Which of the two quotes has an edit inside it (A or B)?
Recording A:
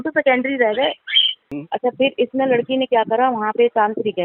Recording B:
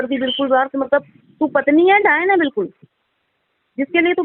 A